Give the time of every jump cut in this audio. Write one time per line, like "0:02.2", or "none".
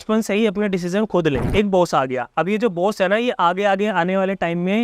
0:01.5